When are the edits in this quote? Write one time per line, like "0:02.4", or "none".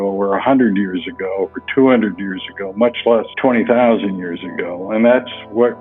0:04.8